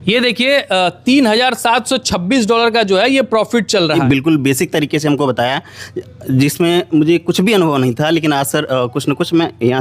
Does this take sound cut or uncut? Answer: cut